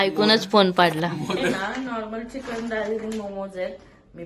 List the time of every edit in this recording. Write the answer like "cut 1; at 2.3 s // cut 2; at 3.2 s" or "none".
cut 1; at 1.5 s